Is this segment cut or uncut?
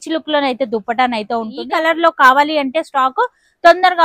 cut